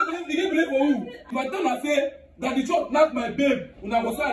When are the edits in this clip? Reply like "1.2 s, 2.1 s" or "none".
1.3 s